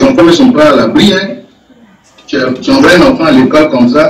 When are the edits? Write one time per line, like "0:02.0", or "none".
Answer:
none